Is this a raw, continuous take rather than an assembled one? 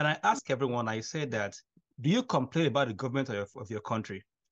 yes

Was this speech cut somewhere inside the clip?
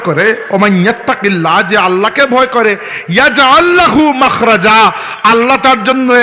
no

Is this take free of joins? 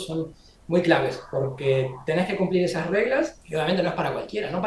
no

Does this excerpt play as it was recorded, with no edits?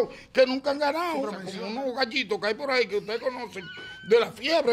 no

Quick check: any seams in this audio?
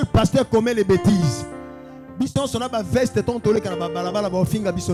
no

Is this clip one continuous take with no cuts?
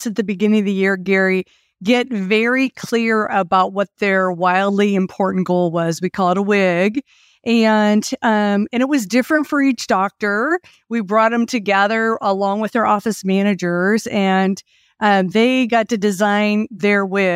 yes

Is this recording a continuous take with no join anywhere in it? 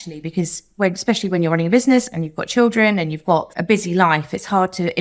no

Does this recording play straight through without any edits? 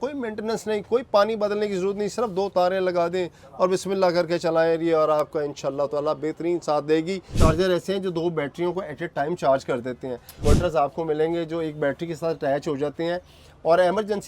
no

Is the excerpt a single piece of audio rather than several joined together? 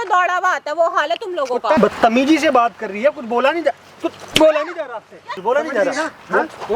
no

